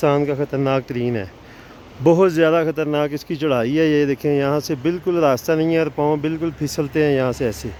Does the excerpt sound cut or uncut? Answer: uncut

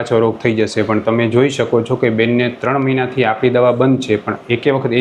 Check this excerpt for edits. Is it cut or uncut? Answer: uncut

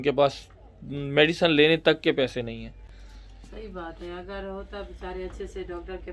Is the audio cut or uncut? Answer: uncut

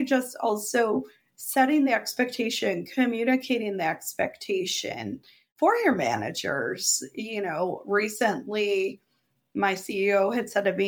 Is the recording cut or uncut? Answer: uncut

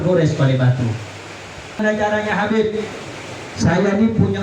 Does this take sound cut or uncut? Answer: cut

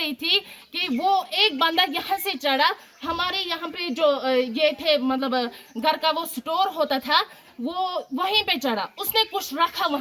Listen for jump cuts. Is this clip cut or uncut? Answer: uncut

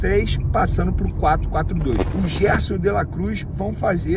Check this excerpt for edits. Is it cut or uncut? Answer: cut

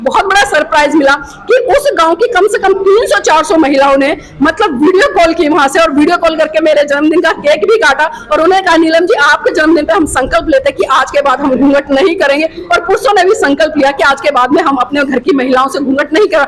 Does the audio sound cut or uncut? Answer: uncut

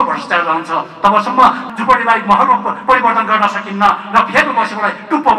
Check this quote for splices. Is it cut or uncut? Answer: cut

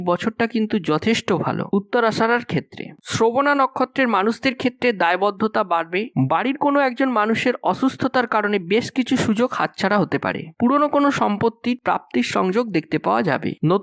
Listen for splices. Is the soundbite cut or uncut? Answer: cut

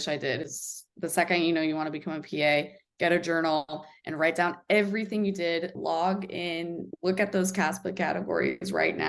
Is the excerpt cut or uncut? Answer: cut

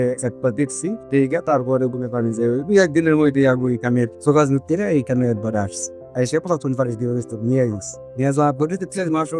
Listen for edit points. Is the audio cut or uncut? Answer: uncut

